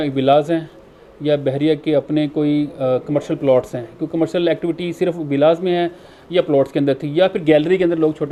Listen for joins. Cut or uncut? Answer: uncut